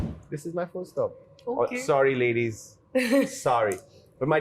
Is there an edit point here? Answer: yes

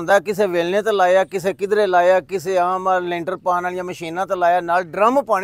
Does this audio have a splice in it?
no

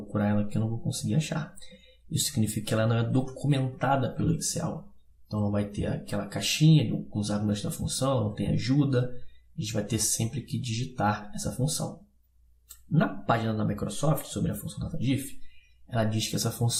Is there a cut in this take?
no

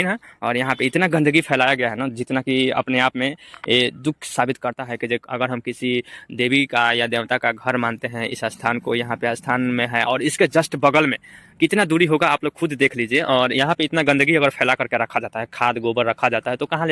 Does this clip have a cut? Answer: no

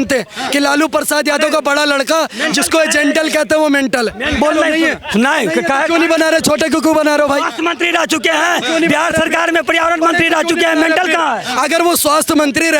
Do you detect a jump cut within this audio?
no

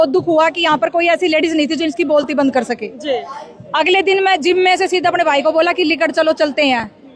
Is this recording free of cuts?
yes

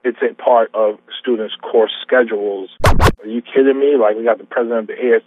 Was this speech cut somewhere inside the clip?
yes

